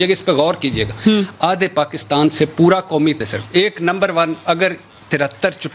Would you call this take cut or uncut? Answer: cut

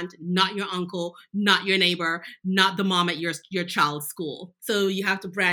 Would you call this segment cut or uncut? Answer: cut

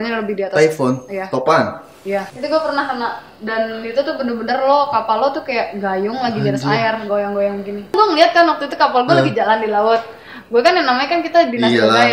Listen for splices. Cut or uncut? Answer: cut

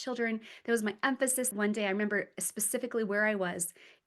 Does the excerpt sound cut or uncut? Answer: cut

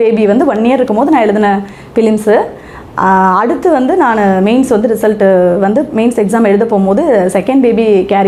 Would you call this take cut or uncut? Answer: uncut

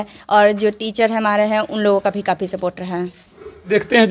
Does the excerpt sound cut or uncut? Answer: uncut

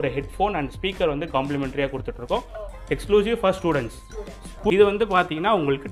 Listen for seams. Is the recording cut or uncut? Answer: cut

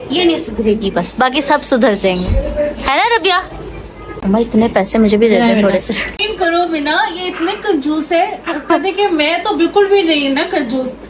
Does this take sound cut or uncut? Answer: cut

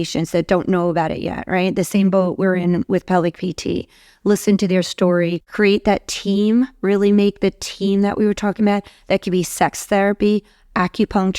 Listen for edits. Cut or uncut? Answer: cut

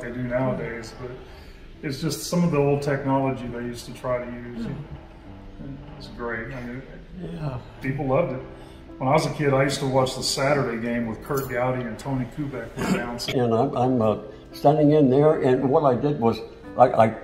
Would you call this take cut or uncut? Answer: cut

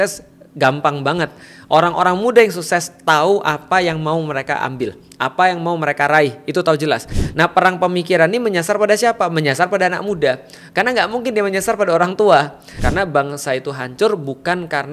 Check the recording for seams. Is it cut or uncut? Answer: cut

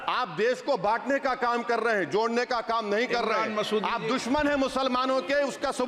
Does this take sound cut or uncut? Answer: uncut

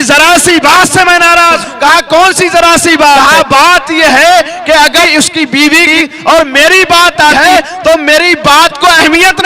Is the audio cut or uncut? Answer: cut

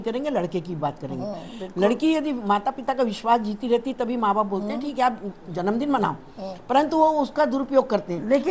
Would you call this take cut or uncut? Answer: uncut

